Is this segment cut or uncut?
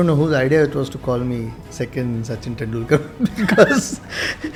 uncut